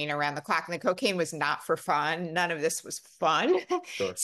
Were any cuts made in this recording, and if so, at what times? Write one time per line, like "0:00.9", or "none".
none